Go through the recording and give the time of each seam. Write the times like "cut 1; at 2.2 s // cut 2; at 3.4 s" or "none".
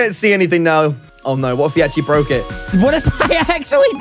cut 1; at 1.1 s // cut 2; at 2.7 s